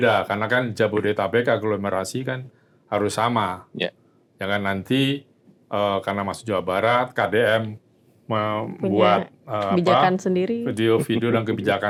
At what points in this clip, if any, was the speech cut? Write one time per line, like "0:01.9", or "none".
none